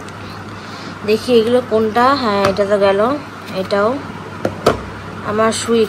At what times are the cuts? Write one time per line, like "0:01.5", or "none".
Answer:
none